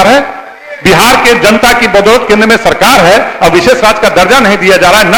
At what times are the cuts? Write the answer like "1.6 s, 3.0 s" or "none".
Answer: none